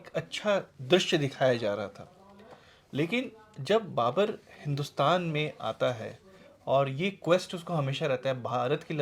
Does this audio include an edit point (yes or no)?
no